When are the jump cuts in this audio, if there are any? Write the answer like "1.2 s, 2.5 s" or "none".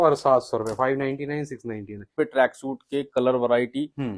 2.1 s